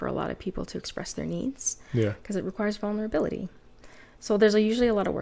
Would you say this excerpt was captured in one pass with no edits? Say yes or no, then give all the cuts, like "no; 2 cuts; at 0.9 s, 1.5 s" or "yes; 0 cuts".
yes; 0 cuts